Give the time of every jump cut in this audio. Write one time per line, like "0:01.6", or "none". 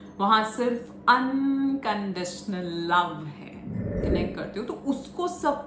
0:04.0

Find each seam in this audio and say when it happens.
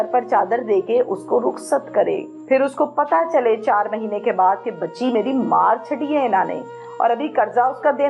0:02.3

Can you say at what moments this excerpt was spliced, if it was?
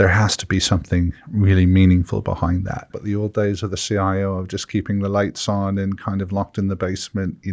0:02.9

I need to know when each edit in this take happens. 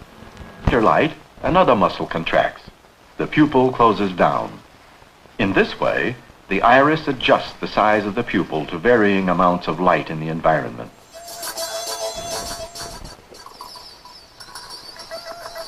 0:14.0

